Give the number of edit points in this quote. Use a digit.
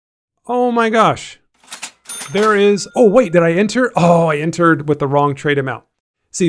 1